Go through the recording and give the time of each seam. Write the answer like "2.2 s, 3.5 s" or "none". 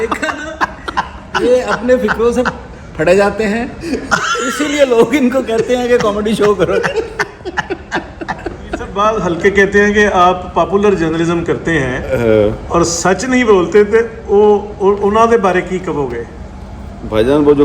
9.0 s